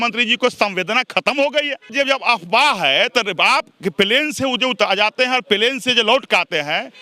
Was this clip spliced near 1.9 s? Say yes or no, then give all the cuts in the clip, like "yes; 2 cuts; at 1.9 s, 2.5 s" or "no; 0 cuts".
yes; 1 cut; at 1.9 s